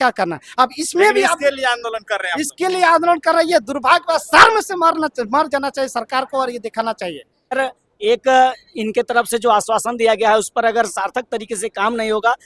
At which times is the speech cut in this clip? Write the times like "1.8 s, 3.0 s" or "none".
7.5 s